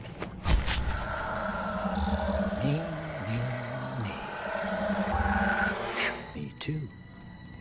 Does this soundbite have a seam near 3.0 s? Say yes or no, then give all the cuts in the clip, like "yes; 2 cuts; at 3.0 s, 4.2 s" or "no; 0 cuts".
no; 0 cuts